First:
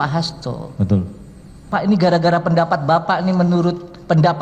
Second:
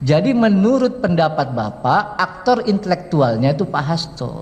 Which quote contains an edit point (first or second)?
first